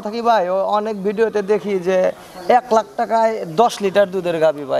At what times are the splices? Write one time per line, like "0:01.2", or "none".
none